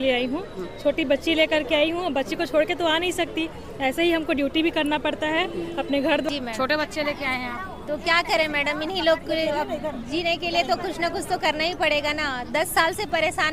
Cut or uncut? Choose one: cut